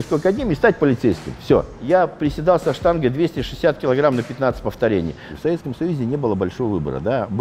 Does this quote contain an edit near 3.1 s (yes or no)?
no